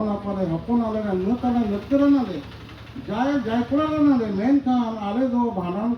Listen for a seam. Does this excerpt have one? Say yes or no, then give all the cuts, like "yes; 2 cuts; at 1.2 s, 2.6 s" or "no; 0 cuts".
no; 0 cuts